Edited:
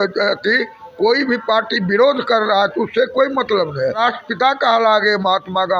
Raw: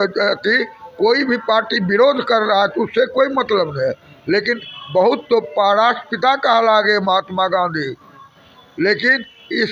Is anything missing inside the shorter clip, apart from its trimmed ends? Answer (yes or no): yes